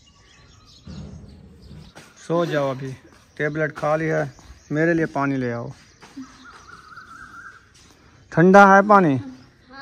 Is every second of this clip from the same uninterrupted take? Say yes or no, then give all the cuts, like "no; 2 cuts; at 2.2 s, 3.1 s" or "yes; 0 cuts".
yes; 0 cuts